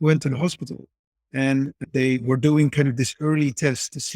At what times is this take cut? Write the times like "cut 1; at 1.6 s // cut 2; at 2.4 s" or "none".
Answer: cut 1; at 1.9 s